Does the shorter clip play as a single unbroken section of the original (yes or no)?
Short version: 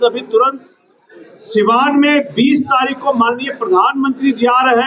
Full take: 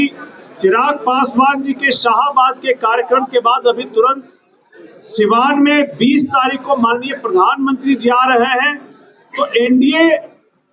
yes